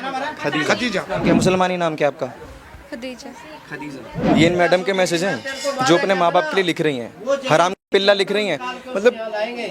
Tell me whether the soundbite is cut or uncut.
cut